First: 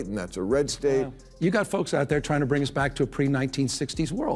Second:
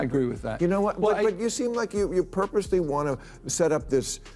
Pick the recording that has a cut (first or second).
first